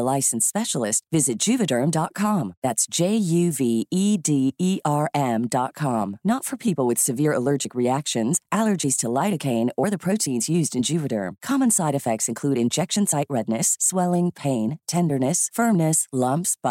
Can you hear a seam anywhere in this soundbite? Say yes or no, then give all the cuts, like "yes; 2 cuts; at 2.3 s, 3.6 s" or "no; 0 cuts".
no; 0 cuts